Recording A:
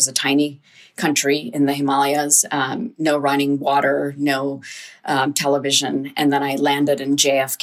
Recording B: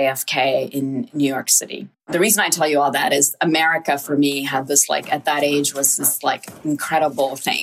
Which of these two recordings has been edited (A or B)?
B